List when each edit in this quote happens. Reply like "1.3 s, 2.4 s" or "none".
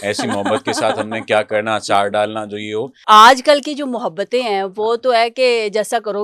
3.0 s